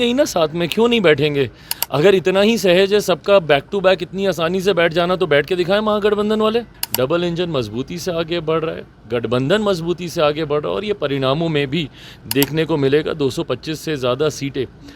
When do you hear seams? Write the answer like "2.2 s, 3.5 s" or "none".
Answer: 6.8 s